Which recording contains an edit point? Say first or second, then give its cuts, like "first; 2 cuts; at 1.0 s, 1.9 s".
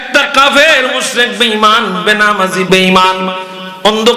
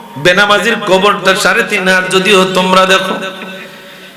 first; 1 cut; at 2.7 s